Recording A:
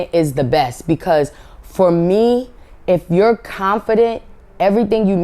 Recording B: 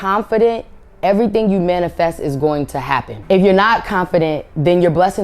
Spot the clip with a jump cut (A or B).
B